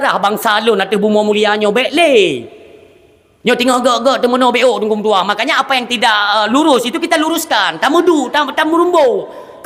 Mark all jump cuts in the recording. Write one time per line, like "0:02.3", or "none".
none